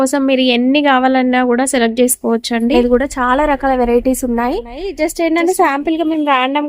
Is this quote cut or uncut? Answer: cut